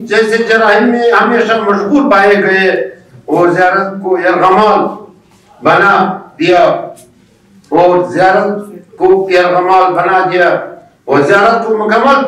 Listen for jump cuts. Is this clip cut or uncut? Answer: uncut